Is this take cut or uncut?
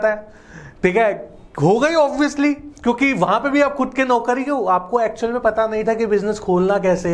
uncut